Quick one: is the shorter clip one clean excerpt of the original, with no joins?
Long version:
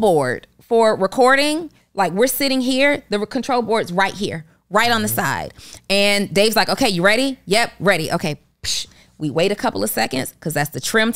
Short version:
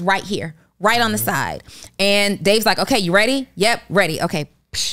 yes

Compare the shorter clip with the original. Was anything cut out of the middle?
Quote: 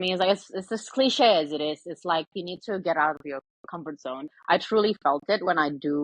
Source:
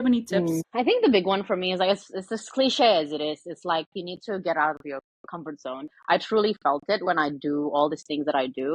no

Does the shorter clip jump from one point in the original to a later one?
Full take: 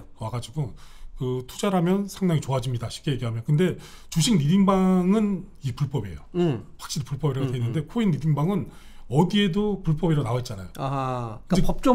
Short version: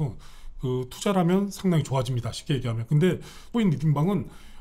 yes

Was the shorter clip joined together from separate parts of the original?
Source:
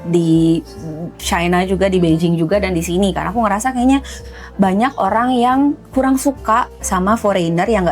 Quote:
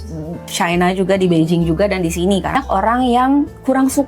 yes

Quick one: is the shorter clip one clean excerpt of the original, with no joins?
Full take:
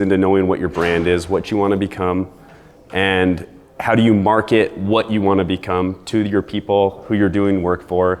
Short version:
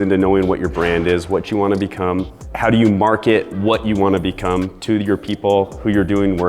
no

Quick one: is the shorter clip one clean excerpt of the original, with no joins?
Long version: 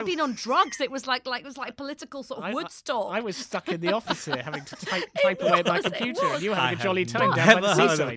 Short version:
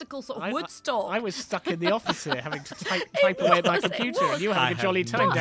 yes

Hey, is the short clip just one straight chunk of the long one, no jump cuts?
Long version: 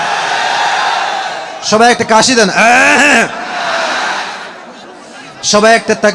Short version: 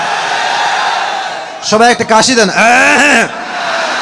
yes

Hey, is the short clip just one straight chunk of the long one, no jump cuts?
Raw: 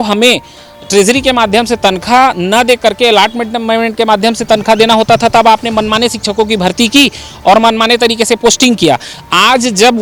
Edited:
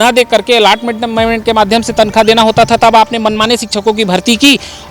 yes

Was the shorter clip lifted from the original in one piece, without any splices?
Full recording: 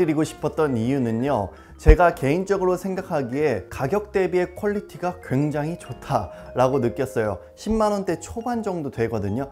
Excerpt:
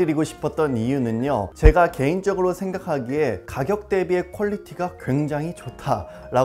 no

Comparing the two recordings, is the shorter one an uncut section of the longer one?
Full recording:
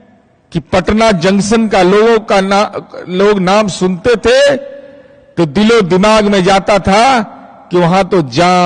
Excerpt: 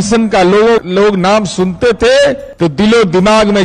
no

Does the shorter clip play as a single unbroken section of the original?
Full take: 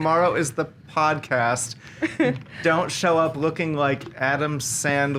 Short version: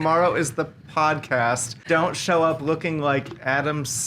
no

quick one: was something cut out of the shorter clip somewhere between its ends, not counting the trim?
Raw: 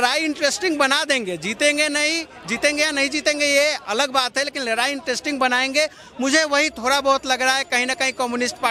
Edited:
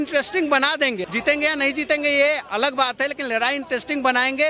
yes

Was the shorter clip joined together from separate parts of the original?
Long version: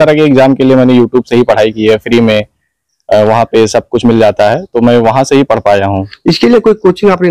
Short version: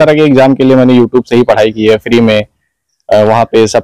no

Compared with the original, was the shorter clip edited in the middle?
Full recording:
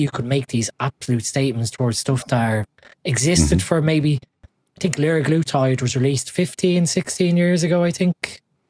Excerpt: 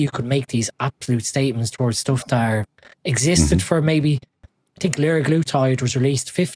no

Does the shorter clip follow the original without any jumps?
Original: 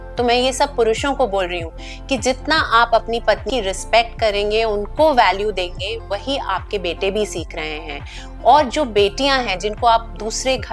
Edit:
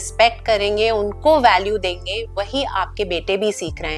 yes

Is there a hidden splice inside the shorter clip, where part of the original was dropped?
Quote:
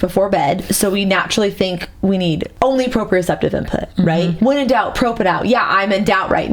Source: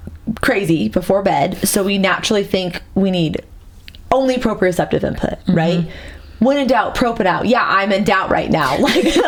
yes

